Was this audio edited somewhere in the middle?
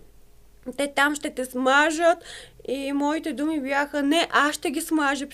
no; 0 cuts

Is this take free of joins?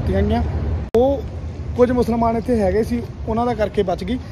no; 1 cut; at 0.9 s

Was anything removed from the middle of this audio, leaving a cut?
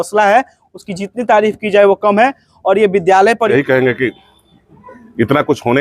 yes; 1 cut; at 3.5 s

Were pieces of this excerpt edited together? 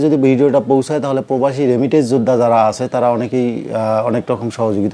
no; 0 cuts

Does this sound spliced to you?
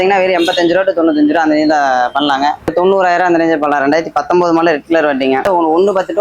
yes; 2 cuts; at 2.7 s, 5.5 s

